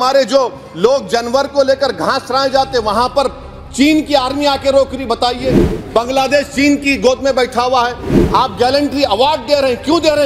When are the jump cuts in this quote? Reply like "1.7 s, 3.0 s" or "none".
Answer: none

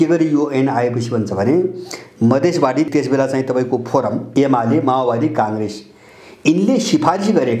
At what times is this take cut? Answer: 2.9 s, 4.3 s

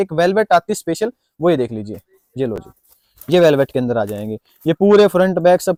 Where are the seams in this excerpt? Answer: none

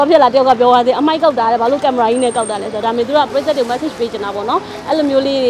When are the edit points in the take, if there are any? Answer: 3.3 s

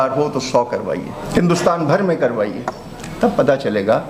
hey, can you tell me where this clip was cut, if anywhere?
1.2 s

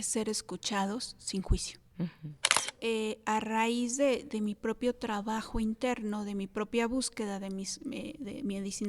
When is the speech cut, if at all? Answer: 2.7 s

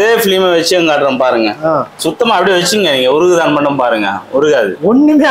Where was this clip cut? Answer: 1.9 s

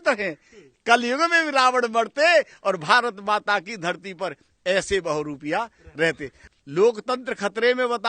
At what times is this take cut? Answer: 6.4 s

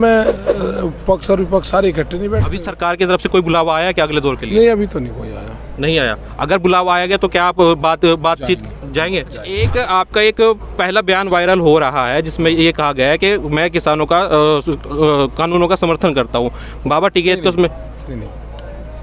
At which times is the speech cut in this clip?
2.6 s, 9.6 s

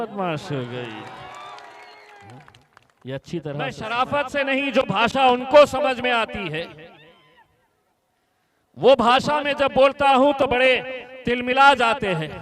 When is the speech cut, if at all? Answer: 3.8 s

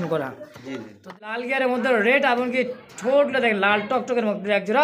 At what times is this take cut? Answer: 1.1 s

